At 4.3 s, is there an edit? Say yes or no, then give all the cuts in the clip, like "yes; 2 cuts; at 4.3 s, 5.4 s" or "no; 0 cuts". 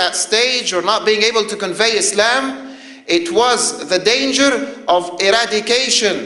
no; 1 cut; at 2.3 s